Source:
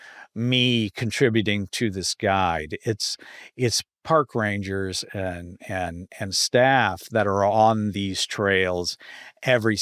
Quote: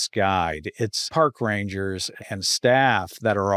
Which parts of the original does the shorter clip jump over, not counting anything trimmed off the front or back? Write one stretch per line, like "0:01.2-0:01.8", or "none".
0:03.1-0:03.9
0:05.1-0:06.0